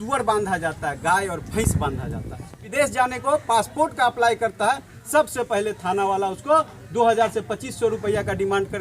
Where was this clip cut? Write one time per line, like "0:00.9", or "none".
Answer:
0:02.7